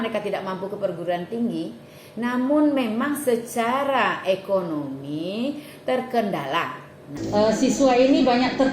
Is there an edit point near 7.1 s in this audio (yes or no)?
yes